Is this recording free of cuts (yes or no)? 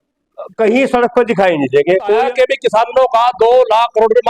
no